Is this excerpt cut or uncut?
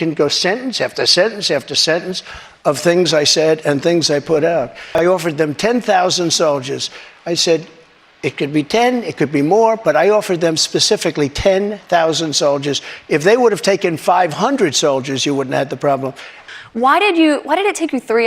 cut